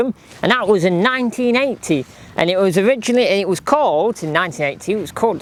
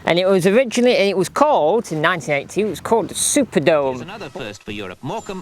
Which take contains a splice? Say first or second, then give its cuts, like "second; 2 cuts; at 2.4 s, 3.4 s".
second; 1 cut; at 4.2 s